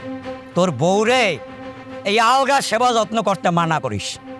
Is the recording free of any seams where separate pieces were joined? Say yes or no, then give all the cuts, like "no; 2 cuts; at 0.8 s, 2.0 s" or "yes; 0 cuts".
yes; 0 cuts